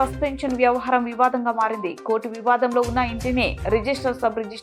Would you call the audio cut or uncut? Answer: uncut